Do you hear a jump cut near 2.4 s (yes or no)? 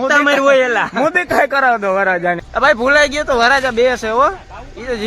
yes